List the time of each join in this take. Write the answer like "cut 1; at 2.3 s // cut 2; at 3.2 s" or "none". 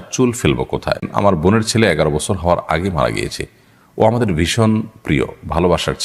cut 1; at 1.1 s